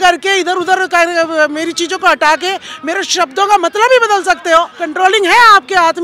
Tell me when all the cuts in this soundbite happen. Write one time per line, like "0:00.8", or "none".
0:04.8